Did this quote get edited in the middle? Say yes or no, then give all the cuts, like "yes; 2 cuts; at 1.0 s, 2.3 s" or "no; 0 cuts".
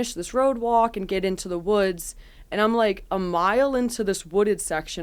no; 0 cuts